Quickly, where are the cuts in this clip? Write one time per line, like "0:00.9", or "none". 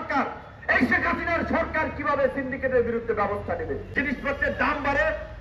0:03.9